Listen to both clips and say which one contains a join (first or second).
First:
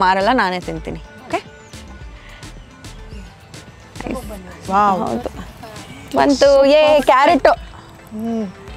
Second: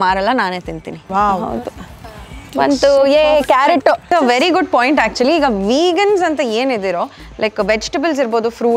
second